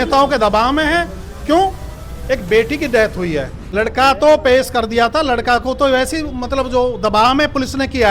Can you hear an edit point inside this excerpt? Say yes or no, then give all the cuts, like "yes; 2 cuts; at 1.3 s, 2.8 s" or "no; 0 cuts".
yes; 1 cut; at 3.6 s